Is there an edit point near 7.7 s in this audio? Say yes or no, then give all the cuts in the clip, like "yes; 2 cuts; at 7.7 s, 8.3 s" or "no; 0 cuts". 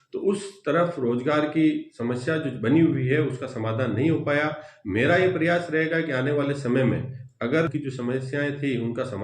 yes; 1 cut; at 7.7 s